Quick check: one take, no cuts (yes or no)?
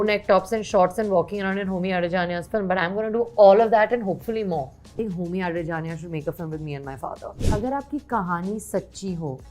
no